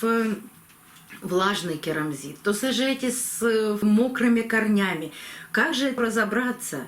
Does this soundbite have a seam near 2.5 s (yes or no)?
no